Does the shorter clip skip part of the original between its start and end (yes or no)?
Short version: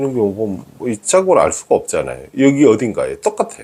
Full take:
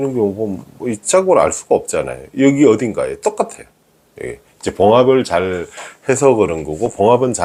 no